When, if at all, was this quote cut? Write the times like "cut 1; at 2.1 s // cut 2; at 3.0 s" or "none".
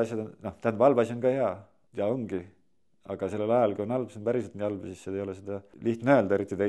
cut 1; at 1.7 s // cut 2; at 5.7 s